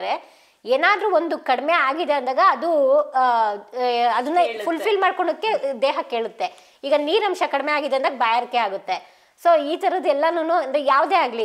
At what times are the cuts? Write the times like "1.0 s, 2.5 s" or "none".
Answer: none